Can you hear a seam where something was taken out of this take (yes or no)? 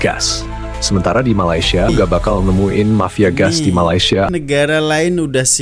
yes